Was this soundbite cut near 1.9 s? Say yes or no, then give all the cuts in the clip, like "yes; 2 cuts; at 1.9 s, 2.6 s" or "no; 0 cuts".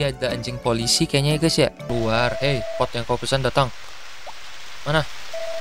yes; 1 cut; at 1.9 s